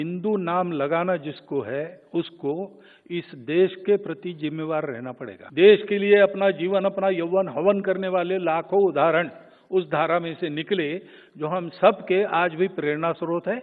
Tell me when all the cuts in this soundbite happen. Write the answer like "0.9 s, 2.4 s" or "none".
5.4 s